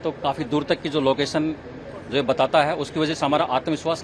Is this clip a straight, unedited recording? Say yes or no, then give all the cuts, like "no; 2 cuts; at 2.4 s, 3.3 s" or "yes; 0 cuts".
yes; 0 cuts